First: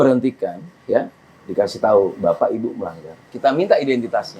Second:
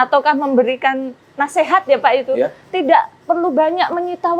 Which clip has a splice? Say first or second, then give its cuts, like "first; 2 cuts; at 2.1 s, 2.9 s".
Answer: first; 1 cut; at 3.2 s